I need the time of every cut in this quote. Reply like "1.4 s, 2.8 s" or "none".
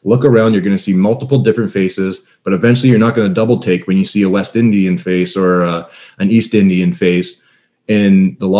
none